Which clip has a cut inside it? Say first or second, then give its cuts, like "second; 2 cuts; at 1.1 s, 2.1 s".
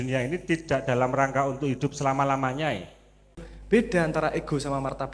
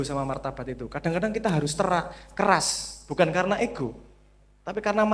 first; 1 cut; at 3.5 s